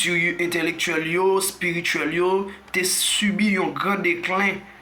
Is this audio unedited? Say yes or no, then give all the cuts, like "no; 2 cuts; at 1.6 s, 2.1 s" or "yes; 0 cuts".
yes; 0 cuts